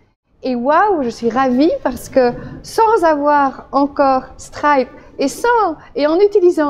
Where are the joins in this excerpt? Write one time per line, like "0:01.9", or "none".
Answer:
none